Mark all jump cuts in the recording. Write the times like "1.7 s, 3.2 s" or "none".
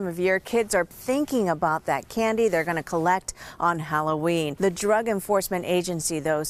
0.9 s, 4.5 s